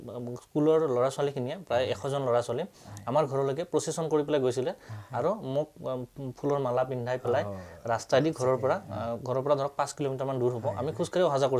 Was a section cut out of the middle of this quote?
no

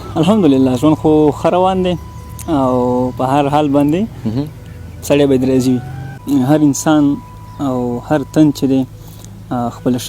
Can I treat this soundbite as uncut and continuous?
no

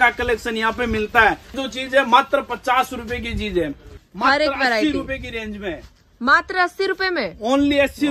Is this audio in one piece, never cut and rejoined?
no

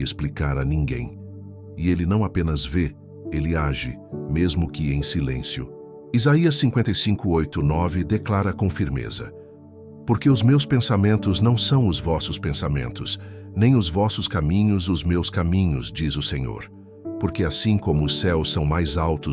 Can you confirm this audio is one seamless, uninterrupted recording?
no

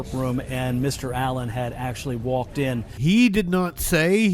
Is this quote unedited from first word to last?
no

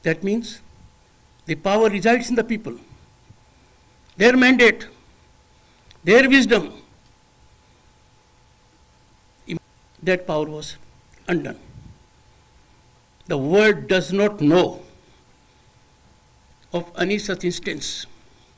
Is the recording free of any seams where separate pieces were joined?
no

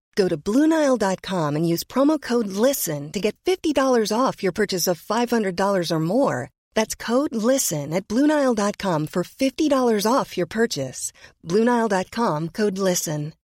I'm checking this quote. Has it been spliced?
no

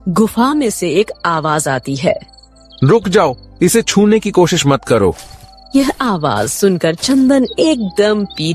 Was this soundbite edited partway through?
no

